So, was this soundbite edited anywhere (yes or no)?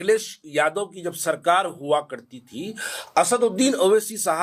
no